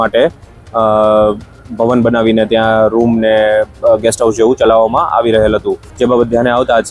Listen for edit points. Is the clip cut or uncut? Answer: cut